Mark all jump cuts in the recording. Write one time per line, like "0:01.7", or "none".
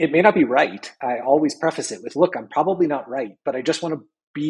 0:01.0

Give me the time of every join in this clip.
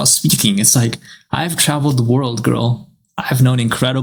none

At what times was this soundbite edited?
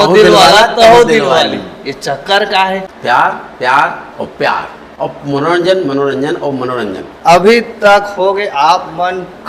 0:02.9
0:07.1

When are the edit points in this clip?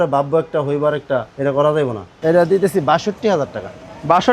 0:01.3
0:02.1

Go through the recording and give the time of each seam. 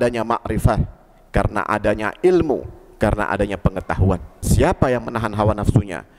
0:04.4

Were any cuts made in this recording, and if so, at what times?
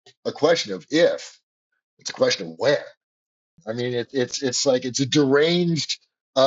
0:03.6

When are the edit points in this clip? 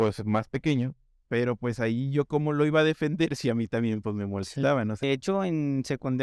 0:05.0

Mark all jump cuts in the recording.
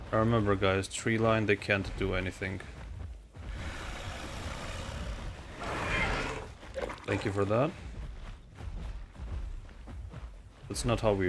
0:09.1

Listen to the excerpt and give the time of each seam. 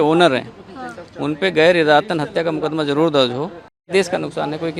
0:03.9

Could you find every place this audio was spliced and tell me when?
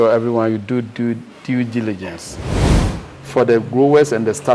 0:02.6

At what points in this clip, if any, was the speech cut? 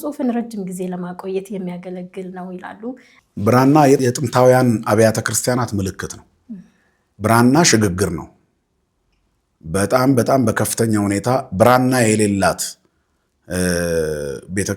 0:03.1

